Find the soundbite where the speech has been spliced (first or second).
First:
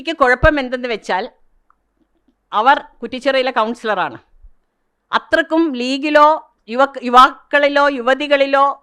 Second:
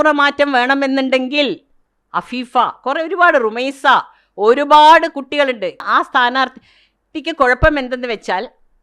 second